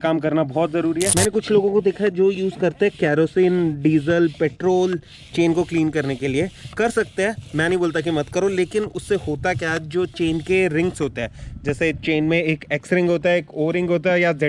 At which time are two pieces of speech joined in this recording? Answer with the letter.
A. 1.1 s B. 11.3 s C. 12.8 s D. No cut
A